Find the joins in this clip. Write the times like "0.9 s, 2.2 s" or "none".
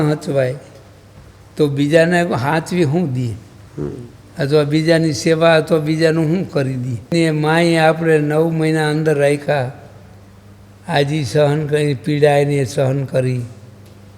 7.1 s